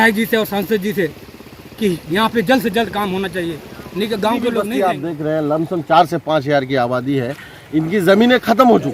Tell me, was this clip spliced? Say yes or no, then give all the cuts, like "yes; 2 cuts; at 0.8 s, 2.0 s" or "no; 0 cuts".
yes; 1 cut; at 4.7 s